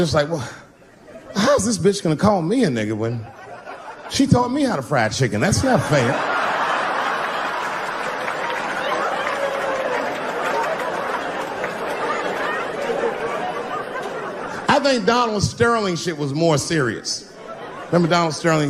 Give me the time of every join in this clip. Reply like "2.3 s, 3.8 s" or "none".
none